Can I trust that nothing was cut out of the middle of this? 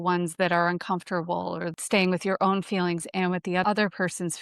no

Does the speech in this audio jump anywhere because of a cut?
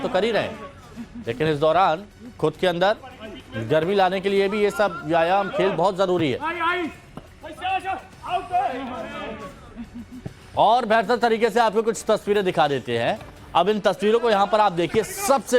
yes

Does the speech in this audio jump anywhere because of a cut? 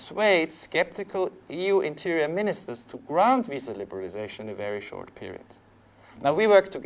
yes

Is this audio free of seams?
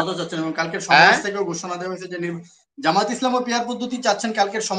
yes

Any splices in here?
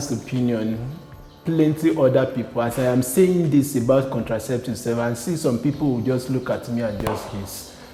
no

